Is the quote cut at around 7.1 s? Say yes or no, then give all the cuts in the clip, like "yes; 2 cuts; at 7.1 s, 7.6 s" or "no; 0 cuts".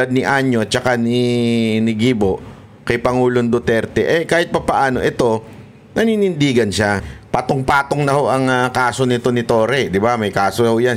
yes; 1 cut; at 7.1 s